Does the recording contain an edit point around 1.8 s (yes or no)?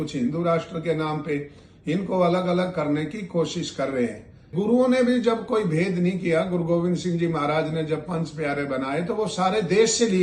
no